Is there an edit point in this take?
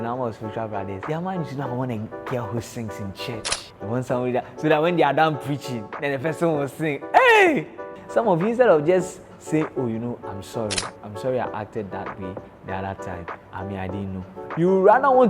yes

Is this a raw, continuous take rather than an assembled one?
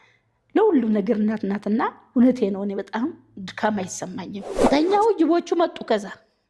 no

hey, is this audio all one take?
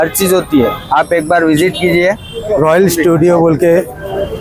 no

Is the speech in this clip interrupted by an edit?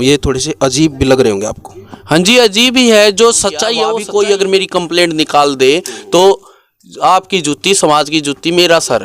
yes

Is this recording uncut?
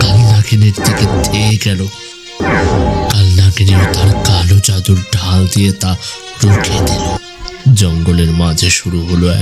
yes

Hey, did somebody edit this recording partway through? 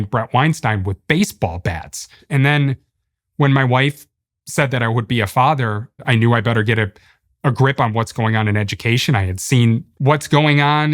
yes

